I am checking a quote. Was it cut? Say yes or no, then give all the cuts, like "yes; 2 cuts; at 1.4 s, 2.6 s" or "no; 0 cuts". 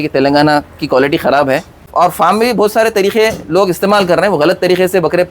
yes; 1 cut; at 1.9 s